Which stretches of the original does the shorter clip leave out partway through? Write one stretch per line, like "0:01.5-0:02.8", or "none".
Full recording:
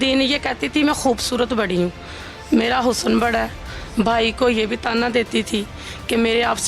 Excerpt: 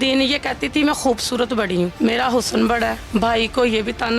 0:01.9-0:02.5
0:03.5-0:03.8